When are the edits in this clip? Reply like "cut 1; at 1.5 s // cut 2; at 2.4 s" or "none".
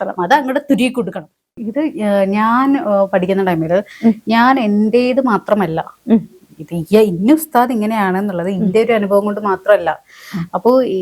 cut 1; at 1.4 s